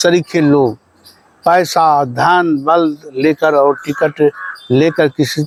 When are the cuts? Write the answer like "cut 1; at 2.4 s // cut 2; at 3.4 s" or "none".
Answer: none